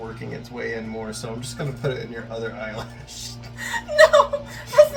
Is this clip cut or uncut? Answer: uncut